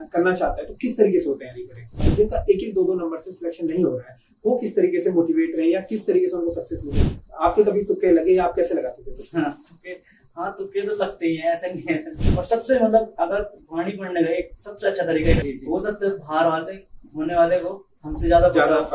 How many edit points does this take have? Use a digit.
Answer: 4